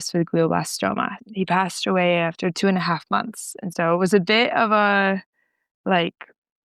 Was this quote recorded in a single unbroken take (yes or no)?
no